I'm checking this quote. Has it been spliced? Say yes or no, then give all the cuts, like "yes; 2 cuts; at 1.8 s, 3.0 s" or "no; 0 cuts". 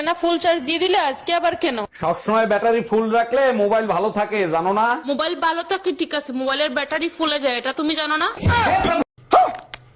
yes; 1 cut; at 9.0 s